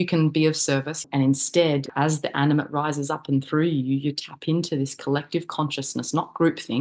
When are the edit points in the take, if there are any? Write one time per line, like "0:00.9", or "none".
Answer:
0:01.1
0:01.9